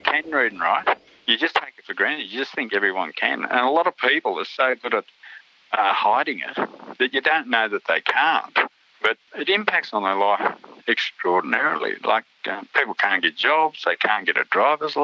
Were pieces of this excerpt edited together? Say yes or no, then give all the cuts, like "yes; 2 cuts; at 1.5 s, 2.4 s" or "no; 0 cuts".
yes; 2 cuts; at 1.1 s, 8.8 s